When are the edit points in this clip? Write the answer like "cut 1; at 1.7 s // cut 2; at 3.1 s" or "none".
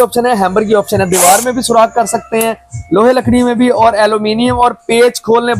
none